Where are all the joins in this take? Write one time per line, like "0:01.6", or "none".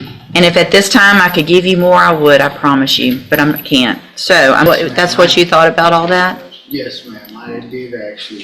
0:04.7